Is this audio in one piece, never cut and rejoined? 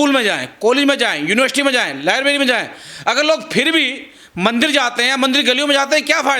yes; 0 cuts

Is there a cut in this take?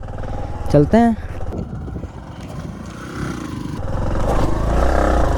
no; 0 cuts

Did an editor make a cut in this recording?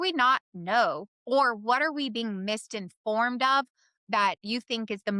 no; 0 cuts

